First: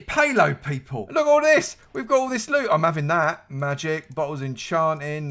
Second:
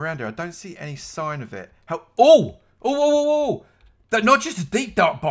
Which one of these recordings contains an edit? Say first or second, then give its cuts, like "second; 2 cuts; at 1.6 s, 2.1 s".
first; 1 cut; at 1.0 s